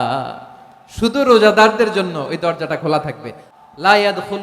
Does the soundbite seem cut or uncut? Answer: cut